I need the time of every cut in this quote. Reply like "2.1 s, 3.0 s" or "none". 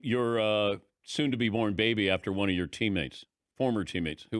none